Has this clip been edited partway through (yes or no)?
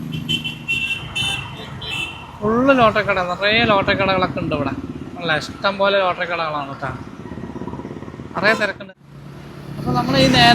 yes